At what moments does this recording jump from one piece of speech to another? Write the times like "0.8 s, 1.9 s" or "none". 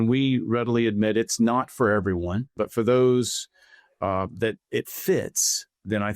2.5 s